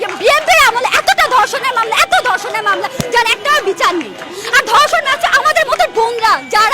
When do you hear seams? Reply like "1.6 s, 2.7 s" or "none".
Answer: none